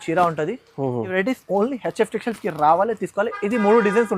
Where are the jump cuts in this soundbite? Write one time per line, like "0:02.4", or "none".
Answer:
0:01.1